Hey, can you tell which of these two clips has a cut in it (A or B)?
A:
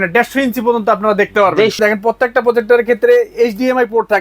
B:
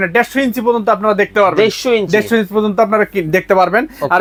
A